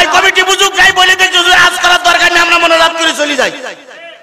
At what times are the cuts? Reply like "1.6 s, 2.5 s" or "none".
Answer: none